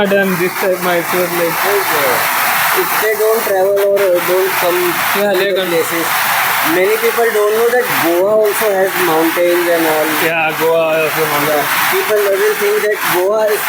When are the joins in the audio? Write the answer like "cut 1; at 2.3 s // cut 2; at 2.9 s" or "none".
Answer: none